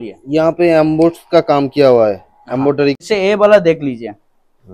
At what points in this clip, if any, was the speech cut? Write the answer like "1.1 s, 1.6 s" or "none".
3.0 s